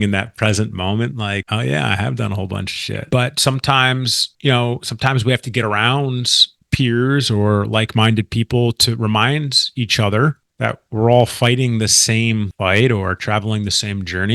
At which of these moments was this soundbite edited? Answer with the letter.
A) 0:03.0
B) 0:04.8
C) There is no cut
A